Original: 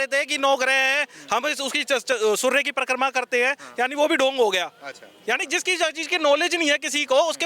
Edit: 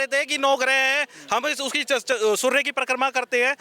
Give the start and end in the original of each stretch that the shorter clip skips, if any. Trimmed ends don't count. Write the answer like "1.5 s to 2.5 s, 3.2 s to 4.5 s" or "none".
none